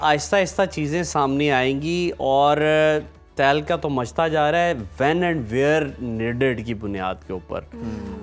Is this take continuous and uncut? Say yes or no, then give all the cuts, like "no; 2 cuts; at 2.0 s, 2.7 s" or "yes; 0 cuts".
yes; 0 cuts